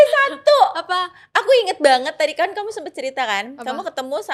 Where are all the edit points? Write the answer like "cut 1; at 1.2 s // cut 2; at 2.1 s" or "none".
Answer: none

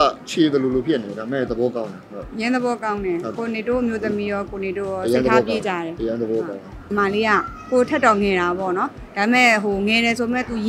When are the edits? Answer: cut 1; at 6.9 s

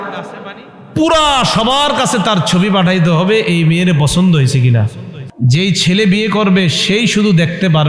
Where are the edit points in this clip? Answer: cut 1; at 5.2 s

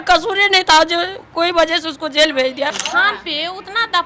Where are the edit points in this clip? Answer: cut 1; at 2.8 s

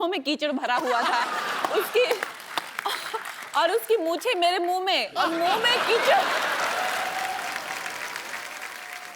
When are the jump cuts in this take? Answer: none

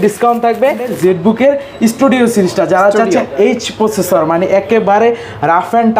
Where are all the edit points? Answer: cut 1; at 0.9 s

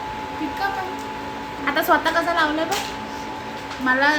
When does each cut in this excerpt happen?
none

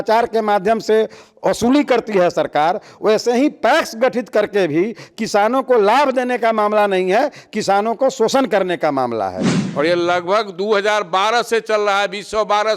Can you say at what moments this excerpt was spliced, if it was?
cut 1; at 9.5 s

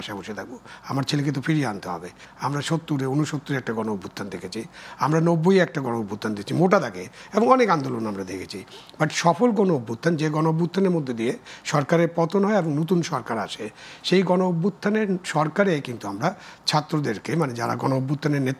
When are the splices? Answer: cut 1; at 2.2 s

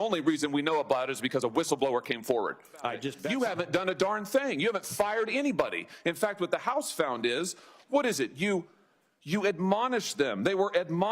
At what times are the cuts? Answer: cut 1; at 3.1 s

